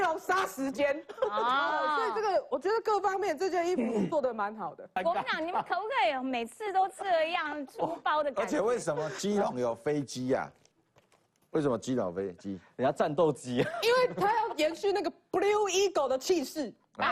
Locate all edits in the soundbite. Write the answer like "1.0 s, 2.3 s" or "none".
5.0 s

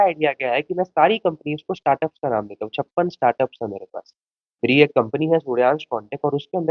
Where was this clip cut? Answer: none

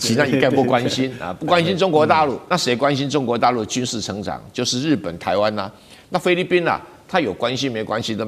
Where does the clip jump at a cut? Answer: 2.4 s

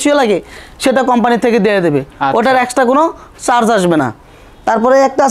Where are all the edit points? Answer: none

